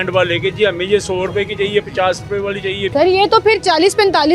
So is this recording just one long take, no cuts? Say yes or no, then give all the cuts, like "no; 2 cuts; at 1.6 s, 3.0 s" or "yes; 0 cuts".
no; 1 cut; at 2.9 s